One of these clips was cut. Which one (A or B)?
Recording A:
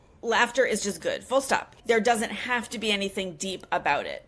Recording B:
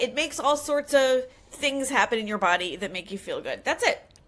A